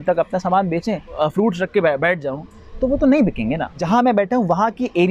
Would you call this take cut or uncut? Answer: cut